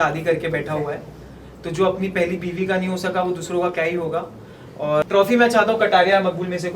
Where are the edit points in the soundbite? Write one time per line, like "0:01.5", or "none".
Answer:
0:05.0